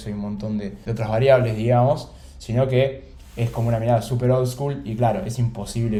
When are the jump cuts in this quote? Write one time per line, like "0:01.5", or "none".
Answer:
none